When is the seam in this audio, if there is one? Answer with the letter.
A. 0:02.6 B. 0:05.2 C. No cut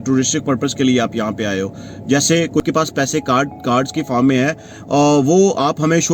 A